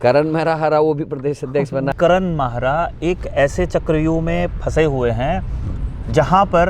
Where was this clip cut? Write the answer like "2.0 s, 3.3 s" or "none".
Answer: 1.9 s

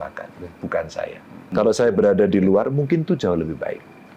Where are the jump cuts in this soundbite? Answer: 1.4 s

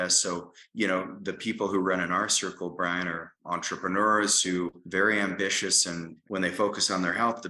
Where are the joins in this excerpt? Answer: 4.8 s, 6.1 s

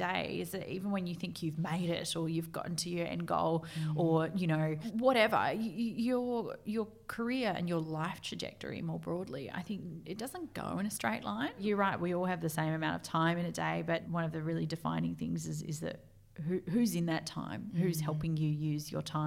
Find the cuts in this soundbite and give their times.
4.8 s, 11.6 s, 14.1 s

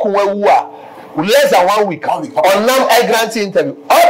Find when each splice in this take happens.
none

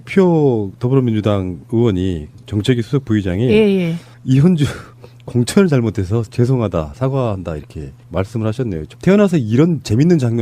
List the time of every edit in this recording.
none

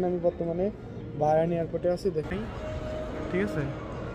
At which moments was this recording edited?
2.3 s

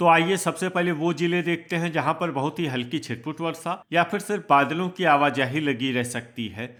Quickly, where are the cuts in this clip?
none

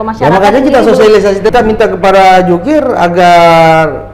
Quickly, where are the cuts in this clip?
1.5 s

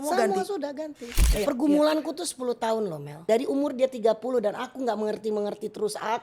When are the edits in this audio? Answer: 1.2 s, 3.1 s

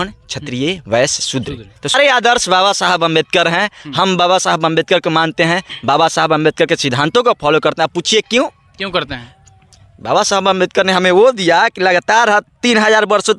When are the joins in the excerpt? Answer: 2.0 s

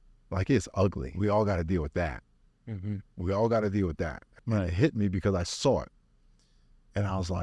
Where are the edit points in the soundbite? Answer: 1.1 s, 4.3 s

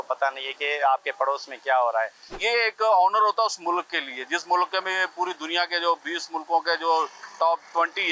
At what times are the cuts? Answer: 2.4 s

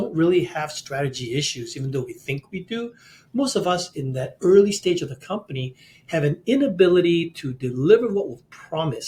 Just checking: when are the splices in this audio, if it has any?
none

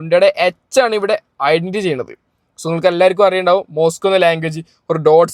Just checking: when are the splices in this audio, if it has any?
none

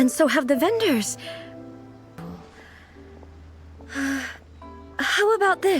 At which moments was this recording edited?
2.3 s

